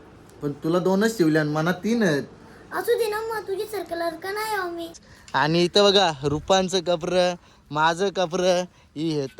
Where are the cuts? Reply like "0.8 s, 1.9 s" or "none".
5.0 s